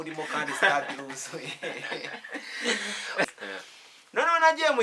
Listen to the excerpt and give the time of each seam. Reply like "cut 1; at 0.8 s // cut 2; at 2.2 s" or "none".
cut 1; at 3.2 s